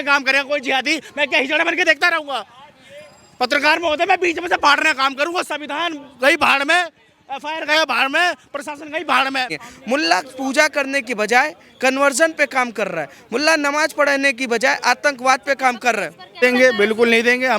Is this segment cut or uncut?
cut